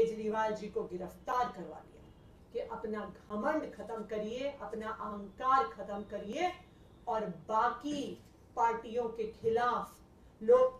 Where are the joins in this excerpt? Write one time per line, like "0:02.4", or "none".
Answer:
0:02.4